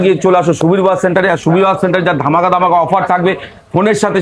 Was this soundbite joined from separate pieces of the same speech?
no; 0 cuts

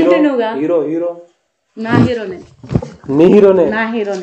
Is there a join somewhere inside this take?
no; 0 cuts

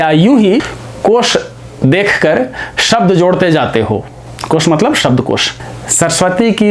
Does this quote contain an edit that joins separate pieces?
yes; 1 cut; at 5.5 s

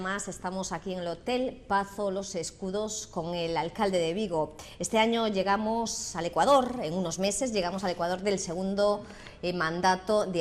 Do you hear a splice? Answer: no; 0 cuts

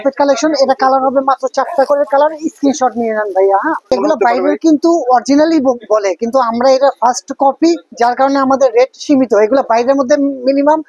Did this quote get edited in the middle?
yes; 1 cut; at 3.9 s

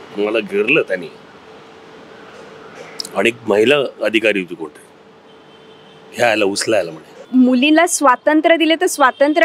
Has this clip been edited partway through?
yes; 1 cut; at 7.2 s

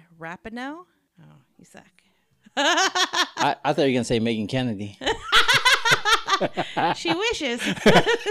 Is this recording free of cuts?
no; 1 cut; at 1.1 s

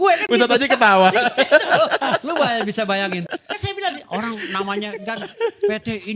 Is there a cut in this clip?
no; 0 cuts

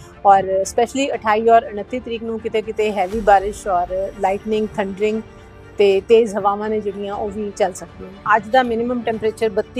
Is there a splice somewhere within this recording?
yes; 1 cut; at 8.2 s

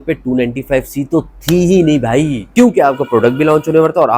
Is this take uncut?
no; 1 cut; at 2.4 s

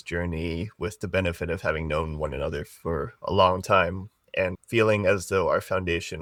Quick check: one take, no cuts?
yes; 0 cuts

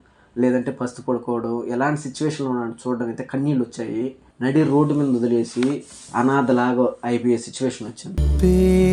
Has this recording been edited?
yes; 1 cut; at 4.2 s

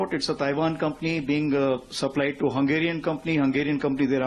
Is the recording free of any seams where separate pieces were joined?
yes; 0 cuts

